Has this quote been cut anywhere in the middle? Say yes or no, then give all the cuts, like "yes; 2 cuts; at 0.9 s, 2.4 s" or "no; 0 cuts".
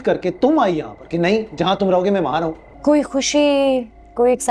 yes; 1 cut; at 2.7 s